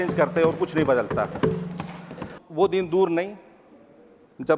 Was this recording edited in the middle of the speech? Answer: yes; 1 cut; at 2.3 s

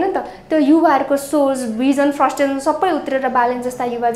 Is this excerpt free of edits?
yes; 0 cuts

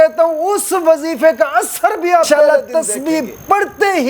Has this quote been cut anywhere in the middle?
yes; 1 cut; at 2.5 s

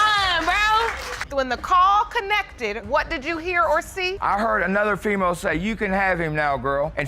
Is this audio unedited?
no; 1 cut; at 1.2 s

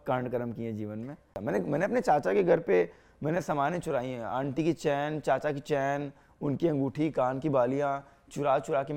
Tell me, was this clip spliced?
yes; 1 cut; at 1.3 s

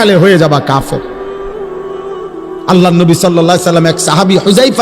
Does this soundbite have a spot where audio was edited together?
yes; 2 cuts; at 1.0 s, 2.4 s

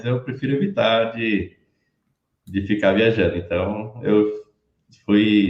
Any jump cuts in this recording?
no; 0 cuts

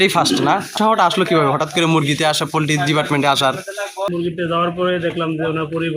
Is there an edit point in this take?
yes; 2 cuts; at 0.7 s, 4.1 s

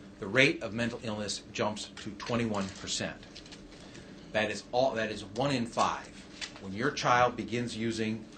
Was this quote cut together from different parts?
yes; 1 cut; at 2.4 s

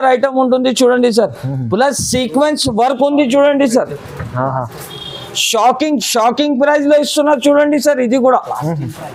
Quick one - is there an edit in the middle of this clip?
no; 0 cuts

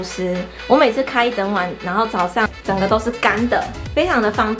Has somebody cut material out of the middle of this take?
yes; 1 cut; at 2.5 s

